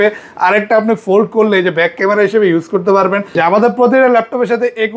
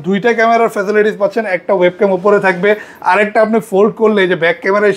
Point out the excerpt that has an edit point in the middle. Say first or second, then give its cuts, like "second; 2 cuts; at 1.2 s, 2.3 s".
first; 1 cut; at 3.4 s